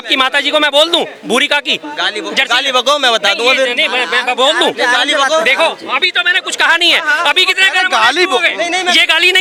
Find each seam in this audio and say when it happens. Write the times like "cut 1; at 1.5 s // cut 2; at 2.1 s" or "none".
none